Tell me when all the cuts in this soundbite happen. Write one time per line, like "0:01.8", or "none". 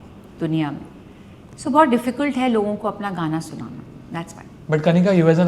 none

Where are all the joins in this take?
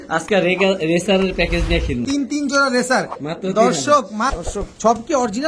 0:02.1
0:04.4

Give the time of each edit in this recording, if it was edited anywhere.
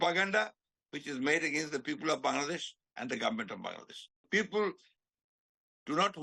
0:04.3

